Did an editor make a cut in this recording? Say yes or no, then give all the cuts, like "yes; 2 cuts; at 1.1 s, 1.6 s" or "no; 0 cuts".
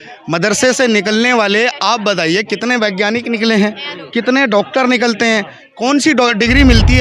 no; 0 cuts